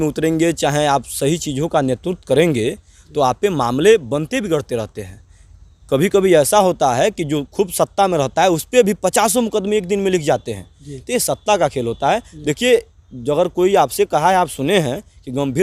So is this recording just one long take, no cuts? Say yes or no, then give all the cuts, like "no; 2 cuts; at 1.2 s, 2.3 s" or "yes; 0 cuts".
yes; 0 cuts